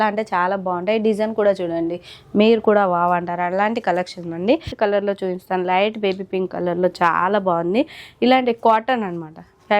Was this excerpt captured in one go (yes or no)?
no